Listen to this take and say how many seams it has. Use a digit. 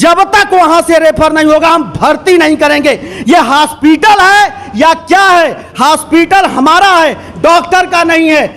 0